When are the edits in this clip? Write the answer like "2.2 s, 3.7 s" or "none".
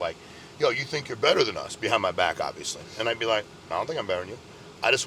none